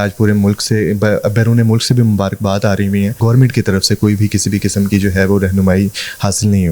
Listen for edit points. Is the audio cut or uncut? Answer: cut